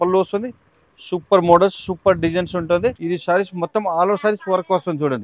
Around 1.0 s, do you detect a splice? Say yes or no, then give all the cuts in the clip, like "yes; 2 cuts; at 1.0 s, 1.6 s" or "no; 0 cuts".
no; 1 cut; at 3.0 s